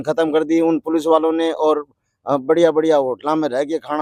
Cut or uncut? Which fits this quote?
uncut